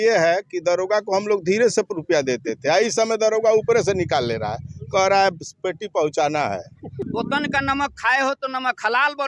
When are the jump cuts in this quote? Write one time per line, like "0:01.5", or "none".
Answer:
0:07.0